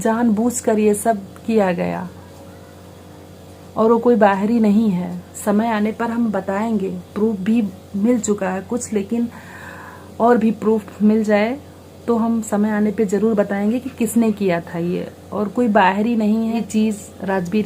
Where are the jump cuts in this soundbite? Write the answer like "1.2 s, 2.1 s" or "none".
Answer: 16.6 s